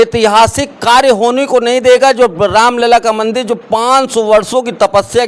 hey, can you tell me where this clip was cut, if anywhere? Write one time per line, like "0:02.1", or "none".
none